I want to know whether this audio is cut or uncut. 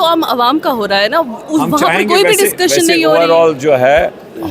uncut